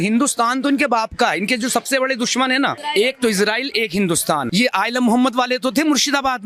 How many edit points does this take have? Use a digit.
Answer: 2